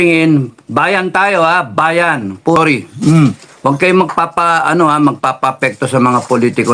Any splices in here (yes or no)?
yes